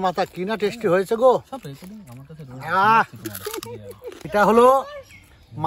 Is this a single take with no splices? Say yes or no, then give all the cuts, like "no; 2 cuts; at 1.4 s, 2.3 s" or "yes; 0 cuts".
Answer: no; 1 cut; at 4.2 s